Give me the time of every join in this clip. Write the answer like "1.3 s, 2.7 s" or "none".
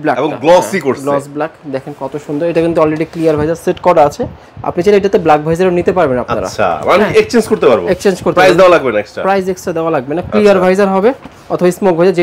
none

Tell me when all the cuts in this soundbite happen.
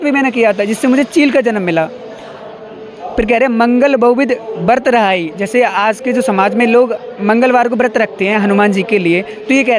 none

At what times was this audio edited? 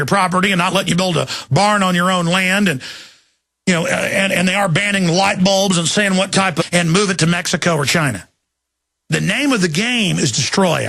none

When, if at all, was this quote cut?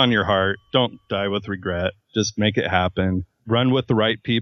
none

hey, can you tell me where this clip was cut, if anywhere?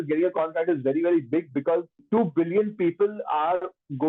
2.0 s

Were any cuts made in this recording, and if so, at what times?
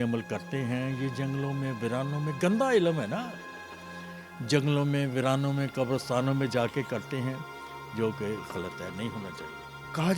none

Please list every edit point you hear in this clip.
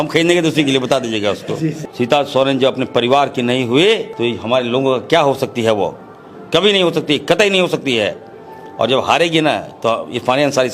1.8 s, 4.1 s

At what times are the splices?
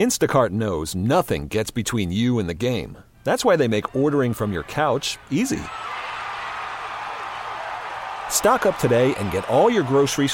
none

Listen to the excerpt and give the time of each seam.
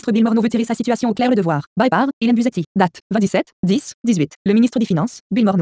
none

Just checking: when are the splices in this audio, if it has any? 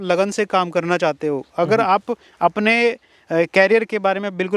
none

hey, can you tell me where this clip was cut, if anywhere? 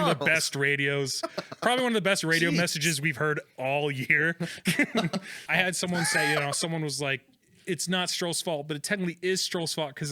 5.4 s

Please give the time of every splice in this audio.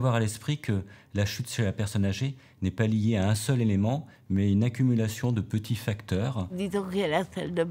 6.5 s

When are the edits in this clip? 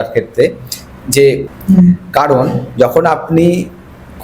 1.5 s

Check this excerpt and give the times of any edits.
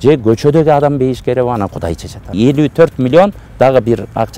2.3 s

